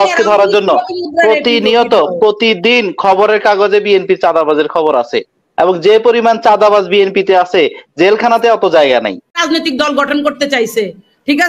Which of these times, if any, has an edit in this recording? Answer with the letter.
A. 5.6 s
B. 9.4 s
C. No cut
B